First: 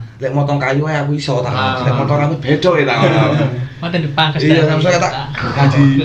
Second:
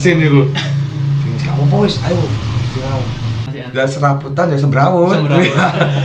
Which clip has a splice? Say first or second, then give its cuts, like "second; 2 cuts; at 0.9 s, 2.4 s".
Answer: second; 1 cut; at 3.5 s